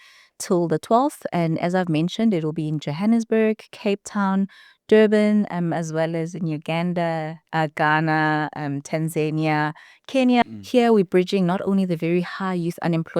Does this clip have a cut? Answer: yes; 1 cut; at 10.4 s

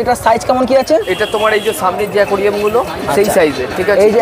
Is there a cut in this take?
no; 0 cuts

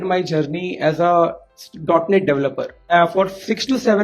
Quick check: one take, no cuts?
no; 1 cut; at 2.8 s

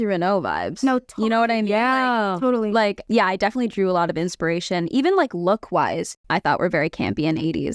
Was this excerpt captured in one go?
no; 2 cuts; at 3.0 s, 6.1 s

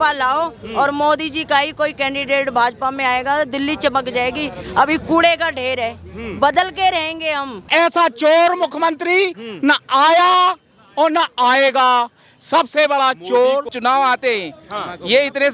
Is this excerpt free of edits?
no; 2 cuts; at 7.7 s, 13.7 s

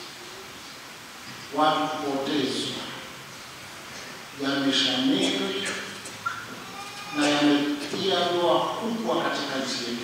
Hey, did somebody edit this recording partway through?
no; 0 cuts

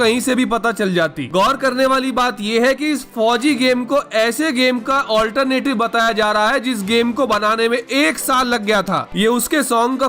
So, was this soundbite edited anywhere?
yes; 1 cut; at 9.1 s

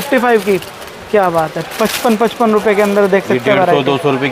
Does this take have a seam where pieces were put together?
no; 0 cuts

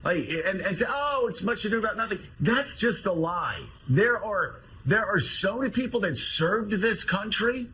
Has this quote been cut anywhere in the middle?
no; 0 cuts

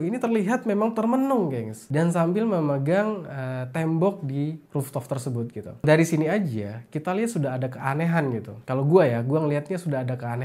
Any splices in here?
no; 0 cuts

